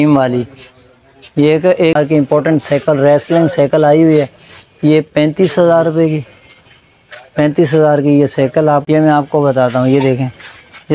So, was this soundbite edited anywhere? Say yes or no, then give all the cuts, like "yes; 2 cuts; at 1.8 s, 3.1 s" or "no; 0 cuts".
yes; 2 cuts; at 1.9 s, 8.8 s